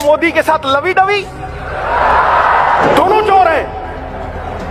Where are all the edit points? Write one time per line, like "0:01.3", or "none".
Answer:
none